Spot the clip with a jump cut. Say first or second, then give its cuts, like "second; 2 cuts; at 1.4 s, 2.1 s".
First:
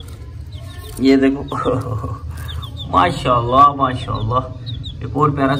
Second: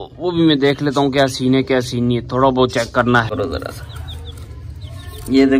second; 1 cut; at 3.3 s